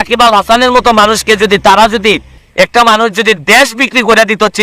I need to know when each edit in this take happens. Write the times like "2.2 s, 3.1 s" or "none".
2.4 s